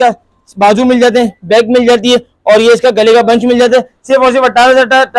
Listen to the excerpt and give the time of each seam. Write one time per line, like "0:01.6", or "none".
none